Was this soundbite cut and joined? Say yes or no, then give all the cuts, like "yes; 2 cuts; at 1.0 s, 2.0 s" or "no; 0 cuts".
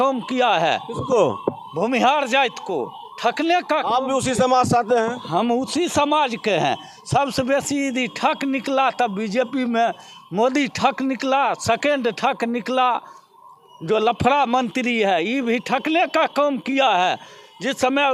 no; 0 cuts